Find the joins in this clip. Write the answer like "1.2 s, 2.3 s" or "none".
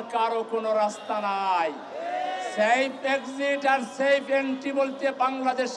none